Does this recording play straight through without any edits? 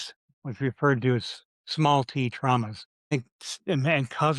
no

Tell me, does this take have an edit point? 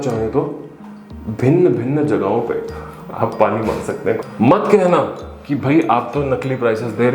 yes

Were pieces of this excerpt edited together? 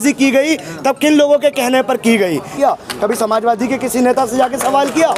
yes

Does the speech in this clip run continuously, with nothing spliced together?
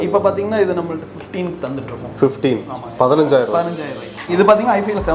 no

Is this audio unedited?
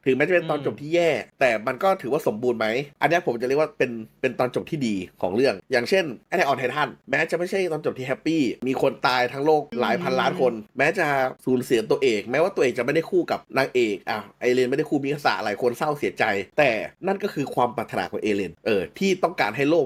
yes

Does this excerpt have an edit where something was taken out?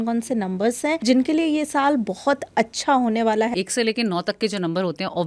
yes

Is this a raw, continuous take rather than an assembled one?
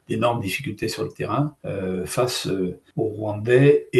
no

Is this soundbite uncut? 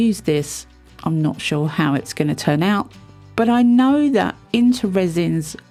yes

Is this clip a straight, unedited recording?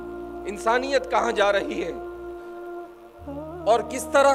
yes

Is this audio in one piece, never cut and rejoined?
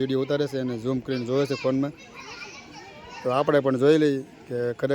yes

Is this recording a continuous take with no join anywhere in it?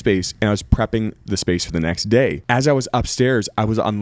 no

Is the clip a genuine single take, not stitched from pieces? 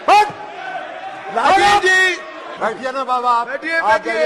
no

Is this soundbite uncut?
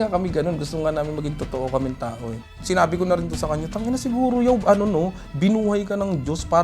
no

